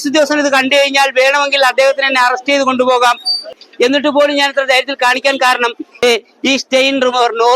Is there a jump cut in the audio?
yes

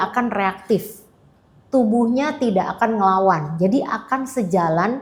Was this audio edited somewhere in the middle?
no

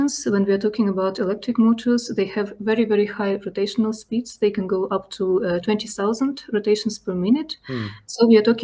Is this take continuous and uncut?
yes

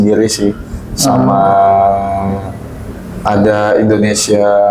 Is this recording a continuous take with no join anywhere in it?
yes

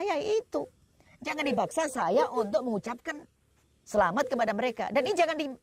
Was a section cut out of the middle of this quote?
no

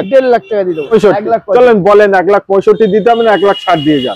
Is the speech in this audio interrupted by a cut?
yes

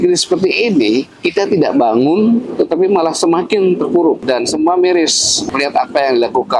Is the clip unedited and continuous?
no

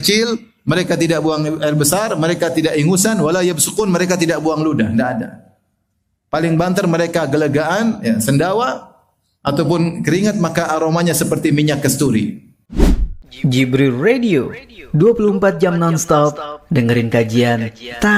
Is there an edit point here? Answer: yes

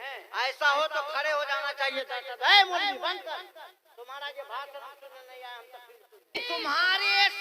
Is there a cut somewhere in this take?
yes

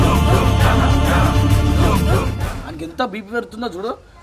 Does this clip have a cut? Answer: yes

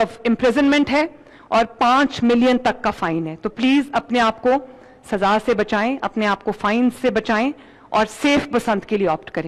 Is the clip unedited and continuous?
yes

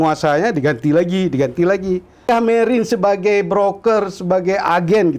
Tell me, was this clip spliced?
yes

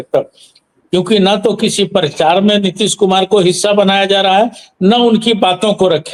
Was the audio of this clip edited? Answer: no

